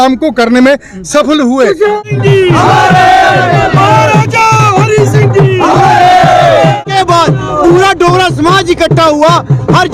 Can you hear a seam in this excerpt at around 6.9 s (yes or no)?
yes